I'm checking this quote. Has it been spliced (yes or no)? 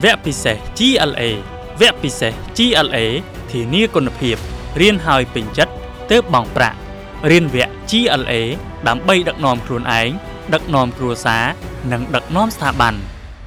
no